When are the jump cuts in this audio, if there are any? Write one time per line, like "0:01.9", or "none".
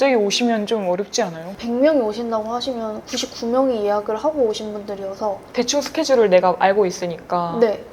0:01.6